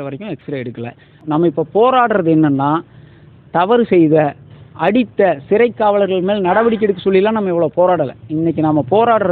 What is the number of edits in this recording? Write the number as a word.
one